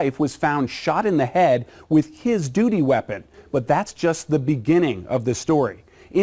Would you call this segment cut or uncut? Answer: uncut